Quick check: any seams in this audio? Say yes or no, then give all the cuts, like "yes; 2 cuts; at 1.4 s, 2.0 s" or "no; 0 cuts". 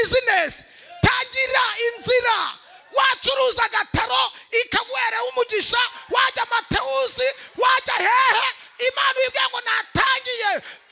no; 0 cuts